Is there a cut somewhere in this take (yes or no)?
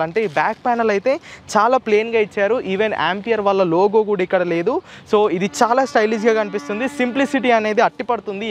no